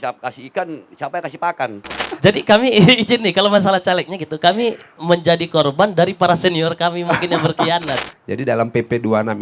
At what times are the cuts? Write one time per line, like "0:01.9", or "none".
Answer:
0:02.0
0:08.1